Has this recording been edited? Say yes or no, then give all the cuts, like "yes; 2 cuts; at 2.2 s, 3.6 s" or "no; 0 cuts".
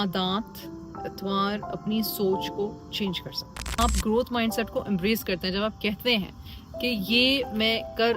yes; 1 cut; at 3.8 s